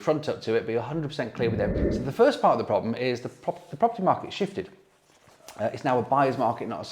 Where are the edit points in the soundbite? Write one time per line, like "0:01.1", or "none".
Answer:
0:01.8